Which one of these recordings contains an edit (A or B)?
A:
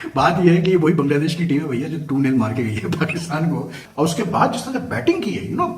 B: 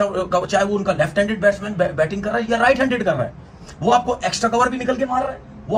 A